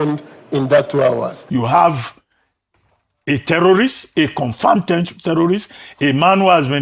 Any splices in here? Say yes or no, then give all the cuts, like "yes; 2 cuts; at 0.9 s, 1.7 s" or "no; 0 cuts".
yes; 1 cut; at 1.4 s